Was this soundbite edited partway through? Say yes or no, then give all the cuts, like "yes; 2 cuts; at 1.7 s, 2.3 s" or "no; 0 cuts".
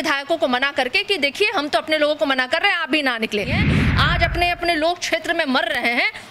yes; 1 cut; at 3.6 s